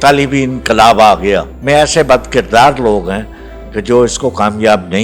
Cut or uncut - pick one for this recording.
cut